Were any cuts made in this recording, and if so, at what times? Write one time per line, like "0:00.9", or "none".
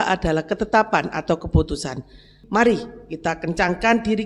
0:02.4